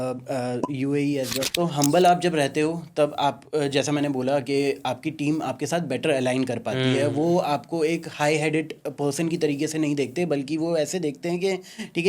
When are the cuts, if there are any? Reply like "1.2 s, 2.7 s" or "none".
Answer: 1.5 s